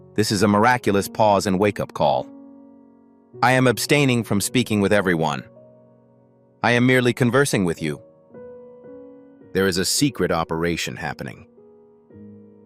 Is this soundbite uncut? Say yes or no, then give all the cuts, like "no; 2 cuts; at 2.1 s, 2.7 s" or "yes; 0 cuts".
no; 2 cuts; at 8.0 s, 9.4 s